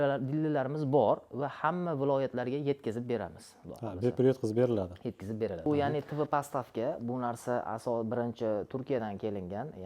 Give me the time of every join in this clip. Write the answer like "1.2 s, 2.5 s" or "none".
5.7 s